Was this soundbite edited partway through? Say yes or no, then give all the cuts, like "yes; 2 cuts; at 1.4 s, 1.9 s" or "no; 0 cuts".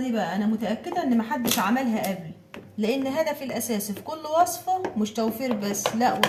no; 0 cuts